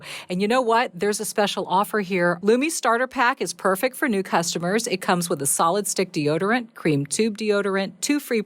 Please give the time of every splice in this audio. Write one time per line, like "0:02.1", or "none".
0:02.4